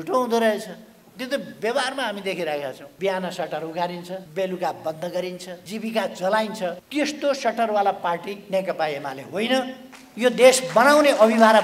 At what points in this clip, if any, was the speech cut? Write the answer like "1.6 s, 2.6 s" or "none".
2.8 s, 4.2 s, 5.5 s, 6.8 s